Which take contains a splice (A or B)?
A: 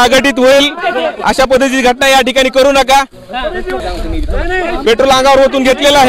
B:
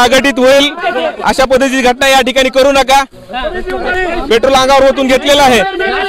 B